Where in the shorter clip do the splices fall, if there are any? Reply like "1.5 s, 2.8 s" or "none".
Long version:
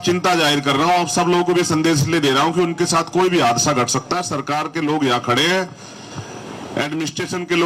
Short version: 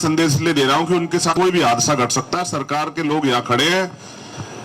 1.3 s